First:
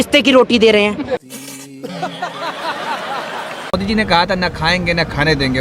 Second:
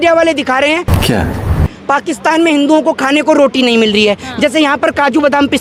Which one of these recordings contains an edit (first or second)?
first